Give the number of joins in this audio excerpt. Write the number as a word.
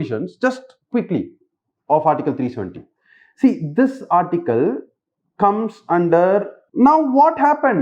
one